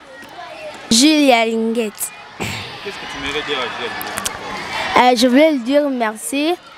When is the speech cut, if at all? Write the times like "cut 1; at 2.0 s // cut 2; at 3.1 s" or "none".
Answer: cut 1; at 0.9 s